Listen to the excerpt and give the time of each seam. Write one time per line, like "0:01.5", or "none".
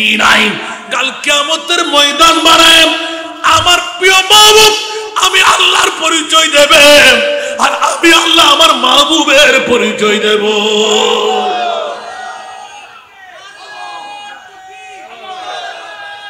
none